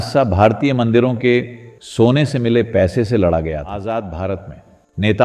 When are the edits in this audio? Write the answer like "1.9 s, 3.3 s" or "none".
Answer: 3.7 s